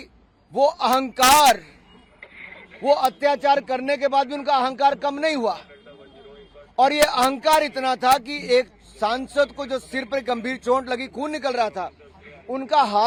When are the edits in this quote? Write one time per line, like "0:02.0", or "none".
none